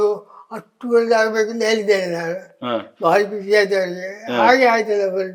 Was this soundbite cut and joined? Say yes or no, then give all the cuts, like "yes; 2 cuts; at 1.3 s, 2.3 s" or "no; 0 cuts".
no; 0 cuts